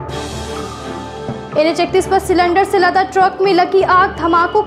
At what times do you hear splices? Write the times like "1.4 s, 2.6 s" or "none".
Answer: 1.2 s